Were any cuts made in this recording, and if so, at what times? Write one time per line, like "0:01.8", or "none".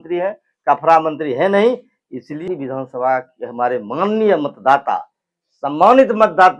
0:02.3